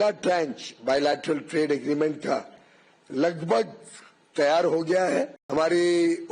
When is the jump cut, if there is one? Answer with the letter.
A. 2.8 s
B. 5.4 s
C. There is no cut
B